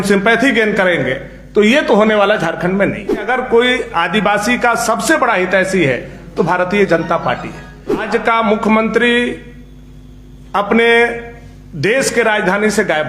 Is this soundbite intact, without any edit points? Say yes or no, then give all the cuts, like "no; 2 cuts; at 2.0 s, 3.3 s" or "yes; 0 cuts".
no; 2 cuts; at 3.3 s, 8.0 s